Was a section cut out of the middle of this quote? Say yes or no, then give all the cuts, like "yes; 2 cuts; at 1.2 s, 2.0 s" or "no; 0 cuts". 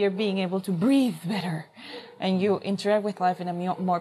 no; 0 cuts